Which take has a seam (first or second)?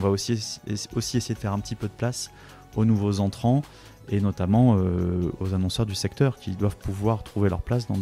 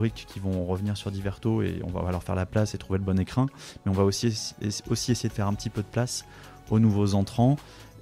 first